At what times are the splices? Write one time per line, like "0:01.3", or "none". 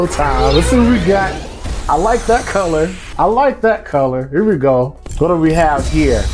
0:03.0
0:05.0